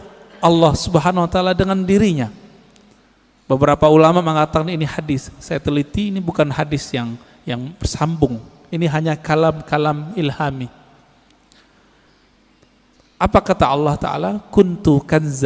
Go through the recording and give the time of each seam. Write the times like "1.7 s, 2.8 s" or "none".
none